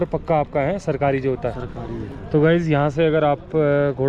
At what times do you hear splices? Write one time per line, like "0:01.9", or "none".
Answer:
none

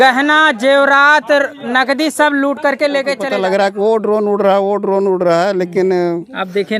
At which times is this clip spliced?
0:03.2

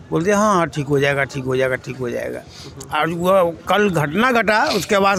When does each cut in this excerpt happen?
none

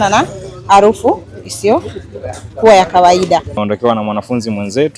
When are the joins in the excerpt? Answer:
0:03.6

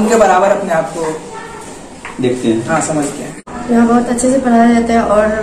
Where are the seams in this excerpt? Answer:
0:03.3

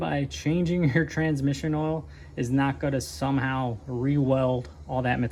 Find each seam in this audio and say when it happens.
none

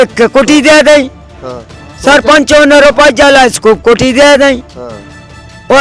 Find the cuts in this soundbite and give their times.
none

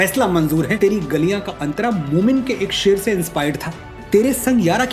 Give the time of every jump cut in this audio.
0:00.8
0:04.0

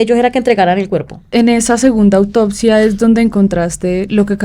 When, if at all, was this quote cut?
0:01.3

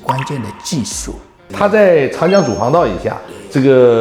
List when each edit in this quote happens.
0:01.5

